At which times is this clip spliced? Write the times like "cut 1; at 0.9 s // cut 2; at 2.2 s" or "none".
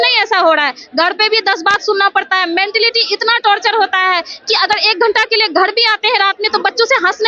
none